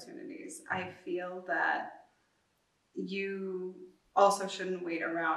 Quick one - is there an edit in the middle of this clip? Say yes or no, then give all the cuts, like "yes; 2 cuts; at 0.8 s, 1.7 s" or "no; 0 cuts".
yes; 1 cut; at 3.9 s